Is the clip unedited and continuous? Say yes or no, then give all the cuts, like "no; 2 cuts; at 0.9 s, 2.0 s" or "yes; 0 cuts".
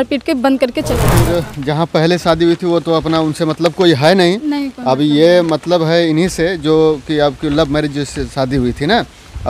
no; 1 cut; at 1.1 s